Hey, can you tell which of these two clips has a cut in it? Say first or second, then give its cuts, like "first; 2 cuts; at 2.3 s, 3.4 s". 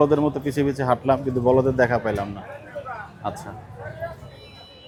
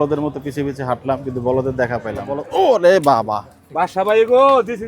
second; 1 cut; at 2.4 s